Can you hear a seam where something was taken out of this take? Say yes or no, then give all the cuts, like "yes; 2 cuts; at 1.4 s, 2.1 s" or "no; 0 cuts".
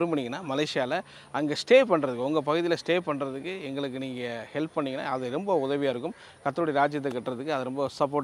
no; 0 cuts